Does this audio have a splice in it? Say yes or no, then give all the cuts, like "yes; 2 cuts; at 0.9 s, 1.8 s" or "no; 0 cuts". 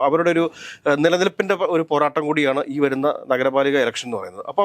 no; 0 cuts